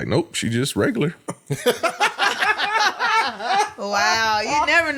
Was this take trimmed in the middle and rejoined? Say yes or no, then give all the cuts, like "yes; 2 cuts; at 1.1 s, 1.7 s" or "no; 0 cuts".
no; 0 cuts